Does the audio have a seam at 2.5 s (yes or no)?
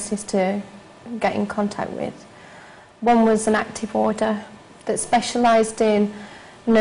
no